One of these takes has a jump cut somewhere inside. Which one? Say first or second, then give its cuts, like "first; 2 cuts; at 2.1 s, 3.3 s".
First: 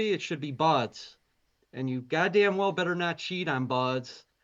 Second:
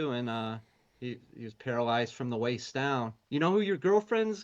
second; 1 cut; at 3.2 s